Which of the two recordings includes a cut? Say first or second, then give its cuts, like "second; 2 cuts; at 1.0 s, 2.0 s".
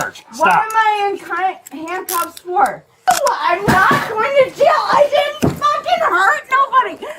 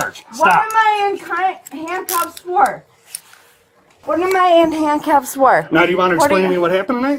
first; 1 cut; at 3.1 s